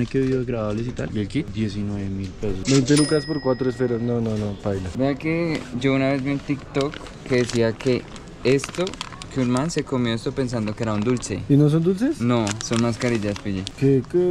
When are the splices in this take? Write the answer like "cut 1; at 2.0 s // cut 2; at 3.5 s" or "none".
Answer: none